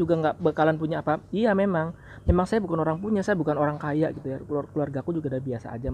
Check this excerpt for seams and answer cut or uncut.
uncut